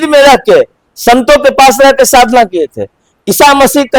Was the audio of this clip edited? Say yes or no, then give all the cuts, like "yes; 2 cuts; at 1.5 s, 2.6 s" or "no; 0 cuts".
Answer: no; 0 cuts